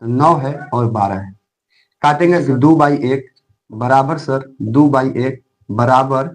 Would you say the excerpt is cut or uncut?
cut